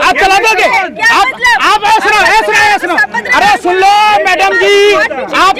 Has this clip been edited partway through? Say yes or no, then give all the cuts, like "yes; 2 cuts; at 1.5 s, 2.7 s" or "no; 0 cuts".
no; 0 cuts